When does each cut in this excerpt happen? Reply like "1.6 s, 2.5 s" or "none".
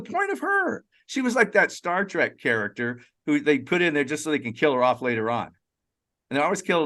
none